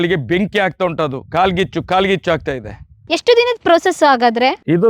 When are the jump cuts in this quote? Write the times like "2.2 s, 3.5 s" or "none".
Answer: 3.0 s